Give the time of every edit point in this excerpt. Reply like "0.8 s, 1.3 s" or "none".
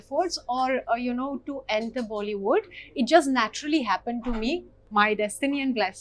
4.8 s